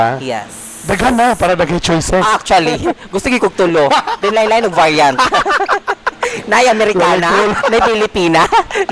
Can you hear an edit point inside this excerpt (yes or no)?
no